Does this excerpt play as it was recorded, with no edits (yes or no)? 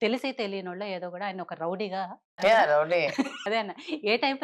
no